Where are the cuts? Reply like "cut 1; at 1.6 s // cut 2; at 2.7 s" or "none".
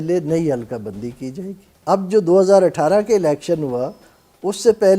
none